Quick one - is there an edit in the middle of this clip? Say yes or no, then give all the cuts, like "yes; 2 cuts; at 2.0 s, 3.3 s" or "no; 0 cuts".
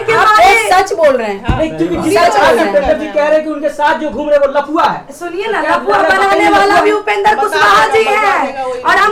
no; 0 cuts